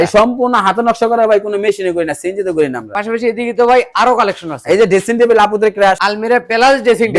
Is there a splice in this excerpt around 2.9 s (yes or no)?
yes